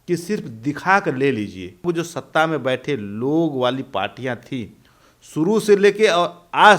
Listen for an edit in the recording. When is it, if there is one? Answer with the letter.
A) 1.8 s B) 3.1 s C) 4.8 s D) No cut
A